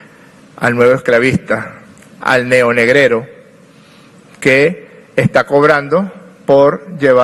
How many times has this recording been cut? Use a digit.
0